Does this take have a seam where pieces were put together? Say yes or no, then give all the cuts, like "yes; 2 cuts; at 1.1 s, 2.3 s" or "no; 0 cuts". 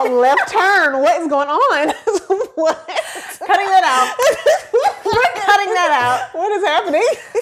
no; 0 cuts